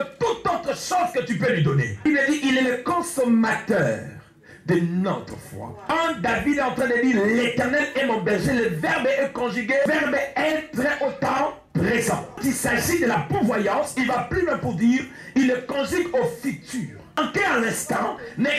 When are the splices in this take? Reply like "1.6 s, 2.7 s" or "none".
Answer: 2.0 s, 5.9 s, 9.9 s, 12.4 s, 17.2 s